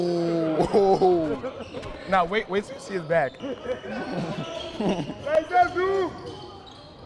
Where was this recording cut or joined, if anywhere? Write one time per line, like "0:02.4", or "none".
0:03.4